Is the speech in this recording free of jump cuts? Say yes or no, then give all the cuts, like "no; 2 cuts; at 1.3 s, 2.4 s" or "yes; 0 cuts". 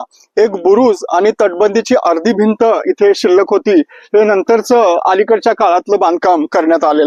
yes; 0 cuts